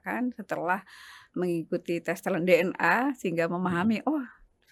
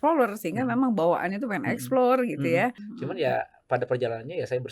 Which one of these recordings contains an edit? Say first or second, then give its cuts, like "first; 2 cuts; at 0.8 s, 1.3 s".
second; 1 cut; at 2.9 s